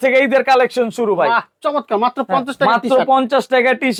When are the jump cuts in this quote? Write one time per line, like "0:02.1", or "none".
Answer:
none